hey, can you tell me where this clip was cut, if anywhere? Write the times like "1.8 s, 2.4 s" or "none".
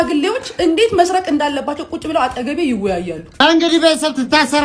3.3 s

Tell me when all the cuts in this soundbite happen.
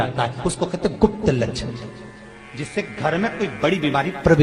none

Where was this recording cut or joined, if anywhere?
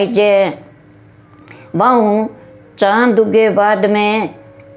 none

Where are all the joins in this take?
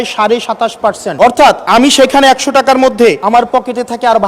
1.1 s, 1.6 s, 3.2 s

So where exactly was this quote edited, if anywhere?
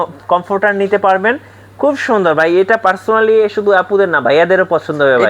none

